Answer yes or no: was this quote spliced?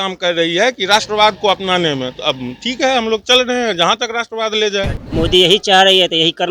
yes